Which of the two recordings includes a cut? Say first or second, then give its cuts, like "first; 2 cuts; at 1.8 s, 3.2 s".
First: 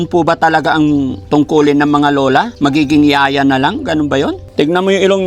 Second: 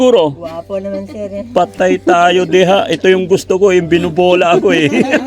first; 3 cuts; at 1.2 s, 2.5 s, 4.4 s